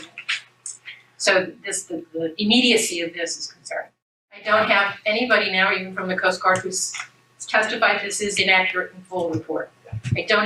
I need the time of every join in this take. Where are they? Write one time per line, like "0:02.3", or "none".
none

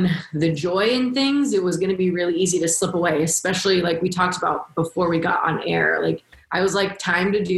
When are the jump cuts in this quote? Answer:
0:06.4

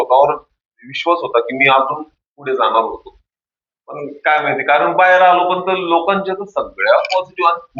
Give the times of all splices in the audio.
none

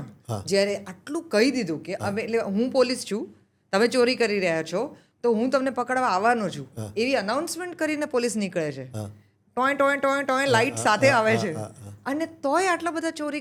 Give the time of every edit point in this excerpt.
none

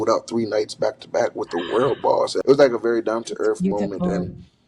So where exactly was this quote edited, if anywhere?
0:02.4

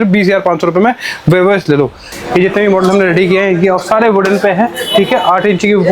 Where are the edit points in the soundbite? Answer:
0:02.1

